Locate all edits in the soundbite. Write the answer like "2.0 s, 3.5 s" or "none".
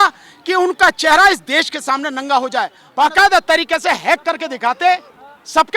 2.8 s